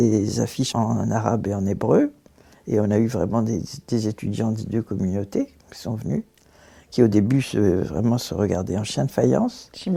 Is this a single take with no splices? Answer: yes; 0 cuts

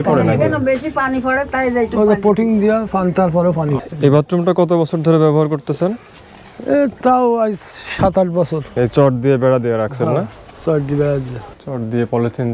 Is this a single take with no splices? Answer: no; 3 cuts; at 3.8 s, 8.7 s, 11.5 s

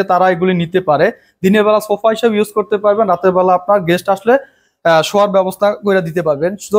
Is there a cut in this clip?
no; 0 cuts

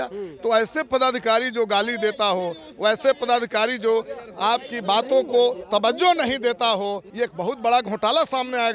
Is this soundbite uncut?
no; 1 cut; at 7.0 s

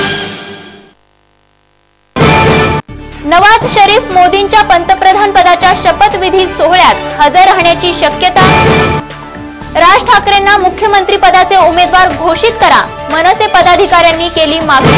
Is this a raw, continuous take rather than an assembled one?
no; 1 cut; at 1.6 s

